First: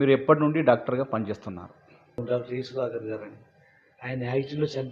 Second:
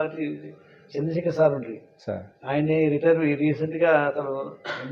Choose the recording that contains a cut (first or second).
first